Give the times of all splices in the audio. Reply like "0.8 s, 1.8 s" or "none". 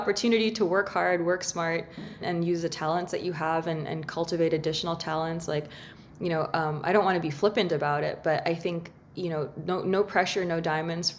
none